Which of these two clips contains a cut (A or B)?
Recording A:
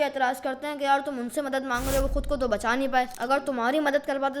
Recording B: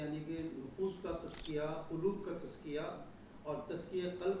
A